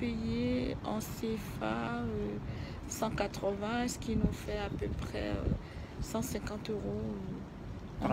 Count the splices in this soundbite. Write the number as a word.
zero